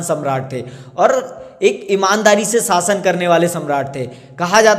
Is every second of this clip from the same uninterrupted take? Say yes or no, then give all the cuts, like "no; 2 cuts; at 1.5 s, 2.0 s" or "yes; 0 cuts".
yes; 0 cuts